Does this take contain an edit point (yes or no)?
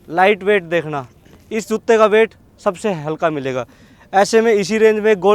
no